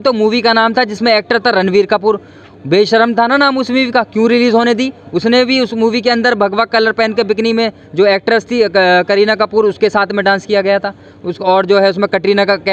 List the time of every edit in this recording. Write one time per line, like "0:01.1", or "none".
none